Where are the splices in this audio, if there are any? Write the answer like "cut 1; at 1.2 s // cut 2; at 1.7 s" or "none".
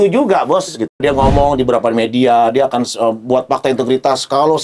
cut 1; at 0.9 s